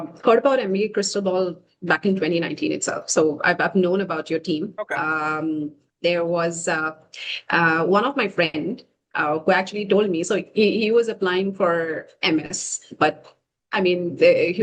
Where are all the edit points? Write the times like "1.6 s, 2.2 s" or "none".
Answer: none